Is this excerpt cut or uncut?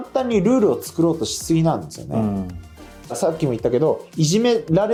uncut